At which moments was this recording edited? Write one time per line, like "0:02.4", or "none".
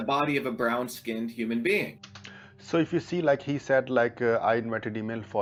none